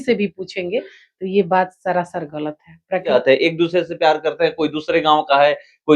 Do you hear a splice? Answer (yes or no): yes